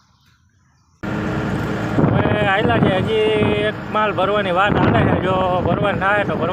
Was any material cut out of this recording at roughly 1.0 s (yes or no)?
yes